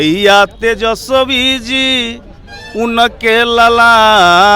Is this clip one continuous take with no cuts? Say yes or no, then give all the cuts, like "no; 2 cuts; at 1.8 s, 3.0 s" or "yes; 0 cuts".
yes; 0 cuts